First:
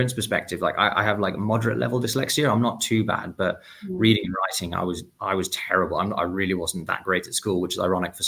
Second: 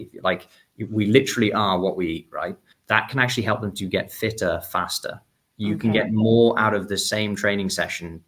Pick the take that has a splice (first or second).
second